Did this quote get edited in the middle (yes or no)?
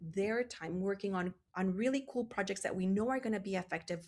yes